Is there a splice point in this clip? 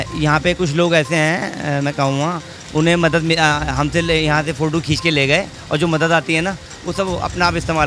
no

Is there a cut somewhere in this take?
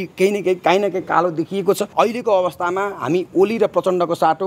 yes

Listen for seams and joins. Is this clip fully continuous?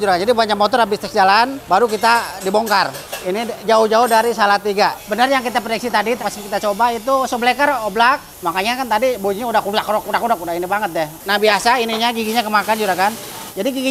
no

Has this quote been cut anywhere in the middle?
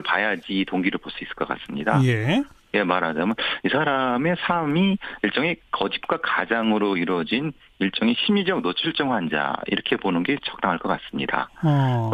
no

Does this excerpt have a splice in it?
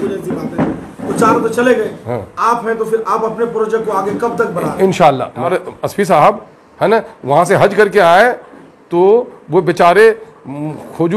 yes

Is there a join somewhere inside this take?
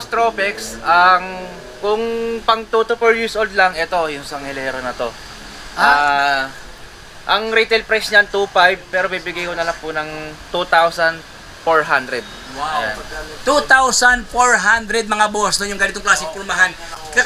no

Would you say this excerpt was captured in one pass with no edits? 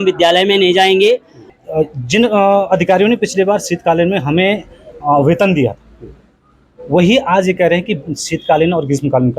no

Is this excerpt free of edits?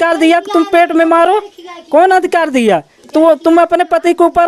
yes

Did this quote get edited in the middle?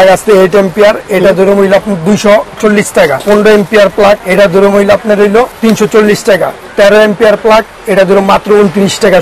yes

